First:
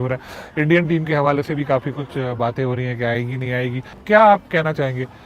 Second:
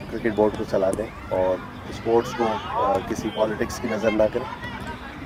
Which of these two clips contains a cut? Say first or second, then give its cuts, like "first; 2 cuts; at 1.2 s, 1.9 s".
first; 1 cut; at 4.0 s